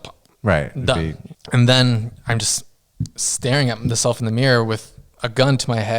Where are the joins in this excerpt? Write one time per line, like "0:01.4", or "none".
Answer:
0:01.3